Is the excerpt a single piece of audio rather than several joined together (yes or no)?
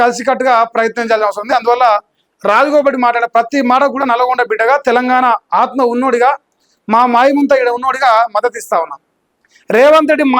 yes